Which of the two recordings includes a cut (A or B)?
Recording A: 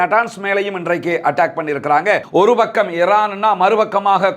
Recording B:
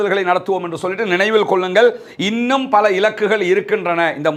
A